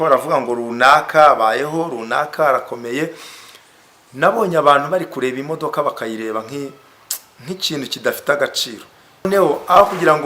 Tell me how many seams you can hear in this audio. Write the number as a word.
one